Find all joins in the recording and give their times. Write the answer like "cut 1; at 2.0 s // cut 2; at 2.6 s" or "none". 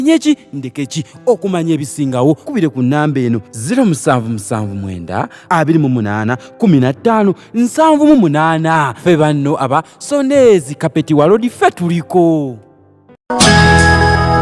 cut 1; at 13.2 s